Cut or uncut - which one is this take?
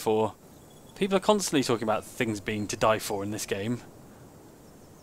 uncut